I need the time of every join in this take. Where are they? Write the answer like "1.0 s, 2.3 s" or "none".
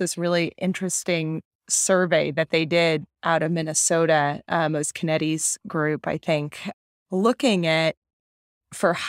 none

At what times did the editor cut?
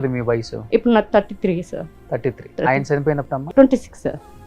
3.3 s

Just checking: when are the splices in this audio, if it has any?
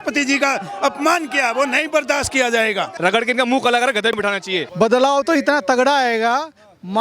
3.0 s, 4.2 s

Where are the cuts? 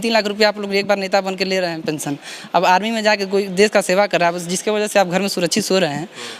none

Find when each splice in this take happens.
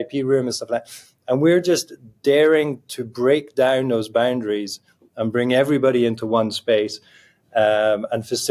none

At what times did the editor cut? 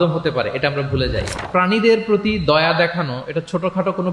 1.4 s

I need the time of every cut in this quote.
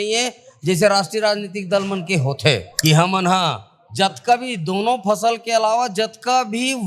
2.7 s

